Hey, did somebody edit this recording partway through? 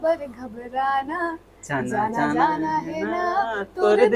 no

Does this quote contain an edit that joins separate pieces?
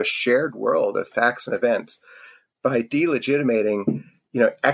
no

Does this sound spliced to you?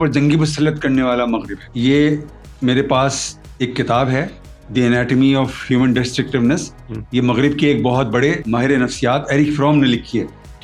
no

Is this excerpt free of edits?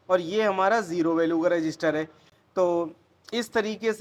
yes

